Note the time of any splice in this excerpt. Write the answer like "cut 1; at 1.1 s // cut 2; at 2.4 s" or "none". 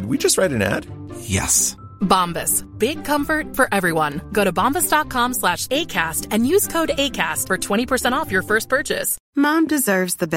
cut 1; at 9.2 s